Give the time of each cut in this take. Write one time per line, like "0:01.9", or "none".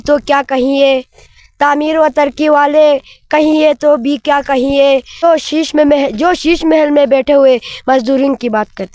none